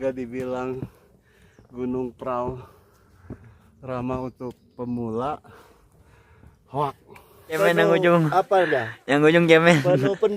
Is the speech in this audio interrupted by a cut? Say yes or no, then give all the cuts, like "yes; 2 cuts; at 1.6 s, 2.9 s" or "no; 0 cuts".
yes; 1 cut; at 7.6 s